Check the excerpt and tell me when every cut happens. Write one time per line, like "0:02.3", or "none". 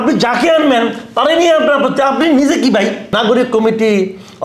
0:03.1

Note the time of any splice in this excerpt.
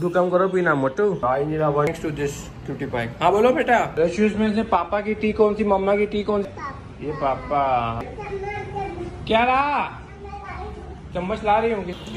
0:01.9

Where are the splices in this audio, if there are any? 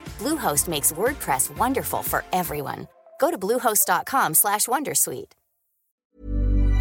0:05.9

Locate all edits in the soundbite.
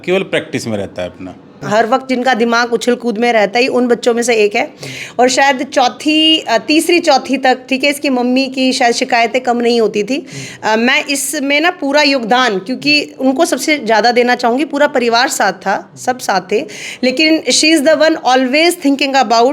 0:01.6

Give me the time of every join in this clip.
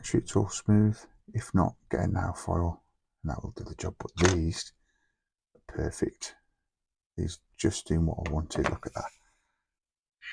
none

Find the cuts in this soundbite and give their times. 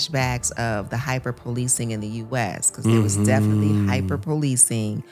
none

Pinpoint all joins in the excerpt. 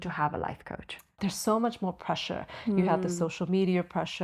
0:01.2

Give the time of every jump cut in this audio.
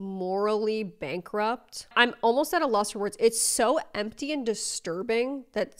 none

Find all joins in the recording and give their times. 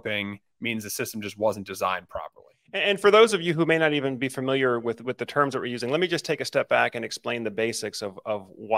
0:02.8

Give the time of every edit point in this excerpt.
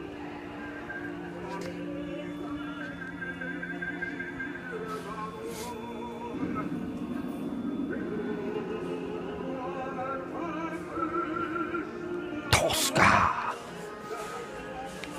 none

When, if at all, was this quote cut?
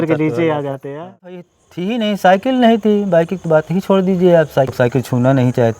0:01.3
0:04.7

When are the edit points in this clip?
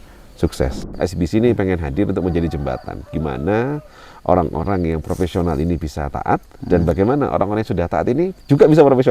0:00.9

